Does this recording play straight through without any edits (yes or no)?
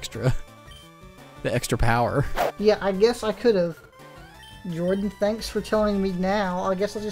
yes